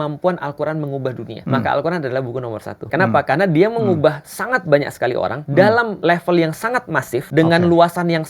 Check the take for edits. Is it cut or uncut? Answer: cut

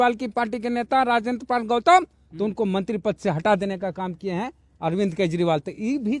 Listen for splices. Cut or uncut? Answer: uncut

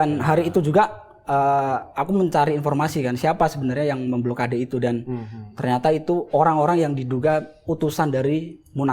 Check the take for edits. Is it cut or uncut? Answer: uncut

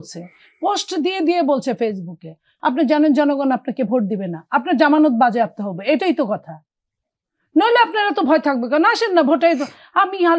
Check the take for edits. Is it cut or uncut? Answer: cut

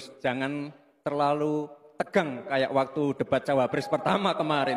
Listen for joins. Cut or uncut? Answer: uncut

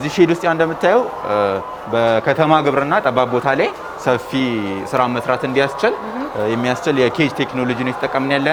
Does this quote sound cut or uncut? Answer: uncut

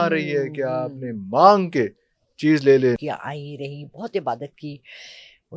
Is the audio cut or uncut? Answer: cut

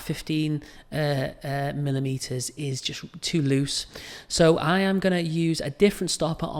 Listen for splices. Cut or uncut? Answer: uncut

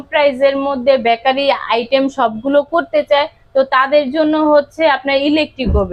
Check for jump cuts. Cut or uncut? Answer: uncut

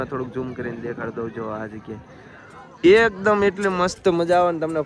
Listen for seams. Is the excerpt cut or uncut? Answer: uncut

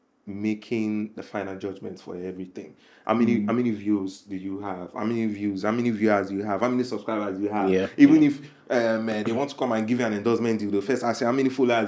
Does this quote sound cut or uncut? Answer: uncut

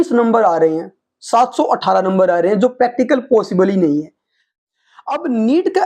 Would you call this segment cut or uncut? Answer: cut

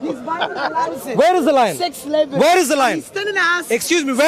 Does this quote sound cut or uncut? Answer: uncut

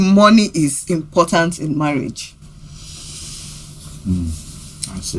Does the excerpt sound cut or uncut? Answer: uncut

